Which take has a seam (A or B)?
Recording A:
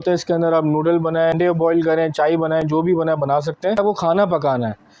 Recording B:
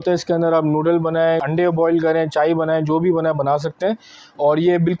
A